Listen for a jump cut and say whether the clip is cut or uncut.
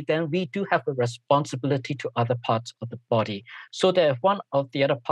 uncut